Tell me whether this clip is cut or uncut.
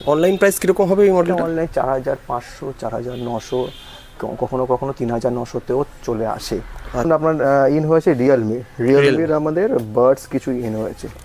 cut